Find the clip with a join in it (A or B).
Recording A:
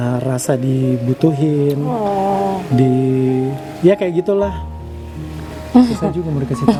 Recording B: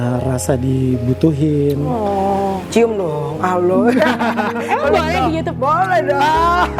B